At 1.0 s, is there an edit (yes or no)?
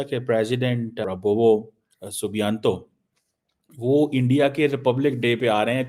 yes